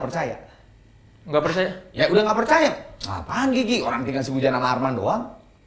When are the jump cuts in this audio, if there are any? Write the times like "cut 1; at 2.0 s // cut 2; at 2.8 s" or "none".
none